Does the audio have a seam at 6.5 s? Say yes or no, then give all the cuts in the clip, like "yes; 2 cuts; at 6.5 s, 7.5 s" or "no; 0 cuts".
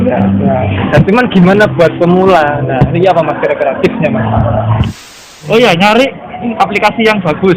yes; 2 cuts; at 5.1 s, 6.5 s